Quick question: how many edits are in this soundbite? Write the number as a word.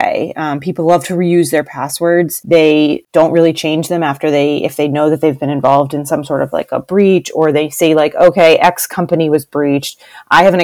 two